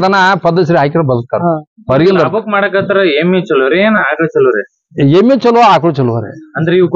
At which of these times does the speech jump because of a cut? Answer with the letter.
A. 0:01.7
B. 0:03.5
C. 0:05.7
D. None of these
D